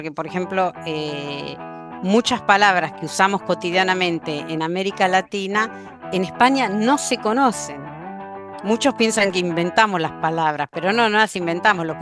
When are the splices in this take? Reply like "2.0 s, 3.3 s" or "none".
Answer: none